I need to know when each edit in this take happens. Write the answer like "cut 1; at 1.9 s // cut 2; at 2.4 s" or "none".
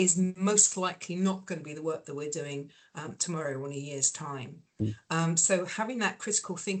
none